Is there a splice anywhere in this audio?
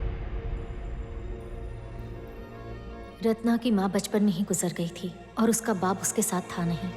no; 0 cuts

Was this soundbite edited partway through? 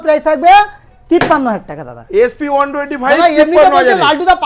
no; 0 cuts

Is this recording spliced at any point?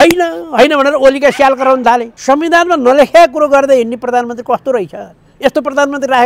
yes; 1 cut; at 2.1 s

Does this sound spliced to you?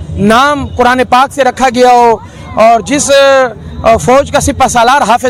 no; 0 cuts

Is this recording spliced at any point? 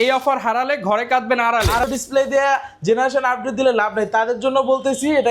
yes; 1 cut; at 1.8 s

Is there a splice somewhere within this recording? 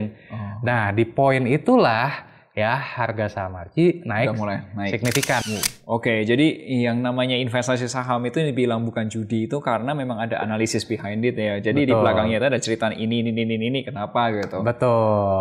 yes; 1 cut; at 5.4 s

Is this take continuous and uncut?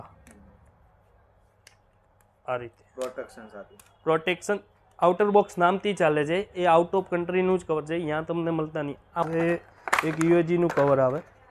no; 1 cut; at 9.2 s

